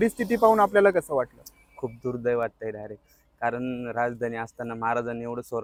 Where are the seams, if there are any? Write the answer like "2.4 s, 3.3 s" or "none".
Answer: none